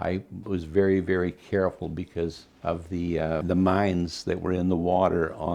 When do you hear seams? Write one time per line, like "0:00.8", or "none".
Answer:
0:02.5
0:03.4

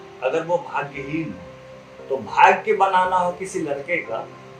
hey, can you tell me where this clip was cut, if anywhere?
none

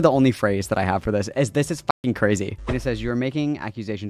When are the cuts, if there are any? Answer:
0:02.6

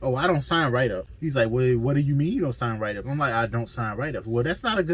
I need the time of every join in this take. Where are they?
0:01.1

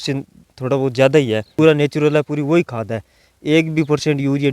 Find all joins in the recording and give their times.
0:01.5

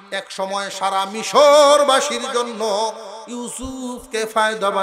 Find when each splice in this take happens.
none

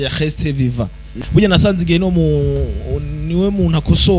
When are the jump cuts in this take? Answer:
0:01.1

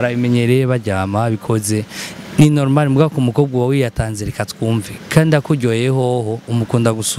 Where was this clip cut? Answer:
none

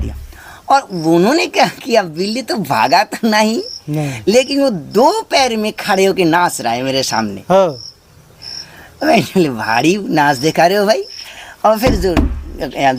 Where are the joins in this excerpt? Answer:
none

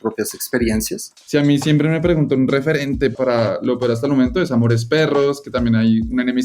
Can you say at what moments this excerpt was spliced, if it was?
0:01.2
0:03.1

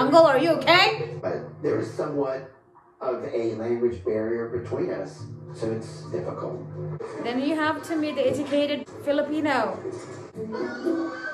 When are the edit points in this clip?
0:01.2
0:06.9
0:08.9
0:10.3

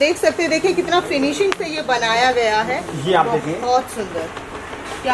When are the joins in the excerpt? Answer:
none

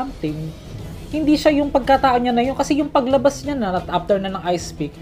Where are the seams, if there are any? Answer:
none

